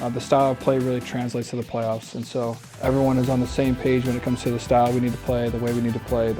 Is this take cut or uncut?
cut